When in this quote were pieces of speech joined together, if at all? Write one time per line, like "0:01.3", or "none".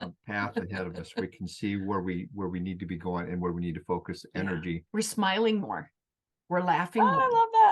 0:04.8